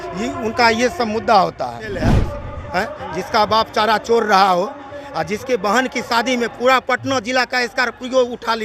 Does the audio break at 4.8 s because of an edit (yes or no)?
no